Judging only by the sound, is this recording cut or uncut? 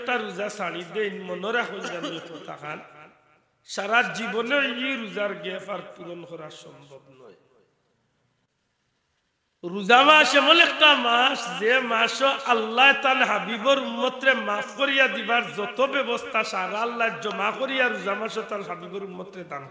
cut